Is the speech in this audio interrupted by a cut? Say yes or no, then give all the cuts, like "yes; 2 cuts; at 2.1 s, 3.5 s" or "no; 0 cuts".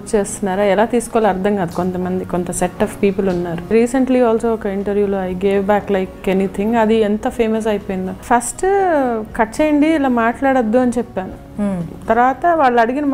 yes; 2 cuts; at 3.7 s, 8.1 s